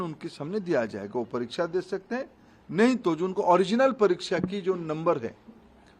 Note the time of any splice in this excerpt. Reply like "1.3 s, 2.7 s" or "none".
none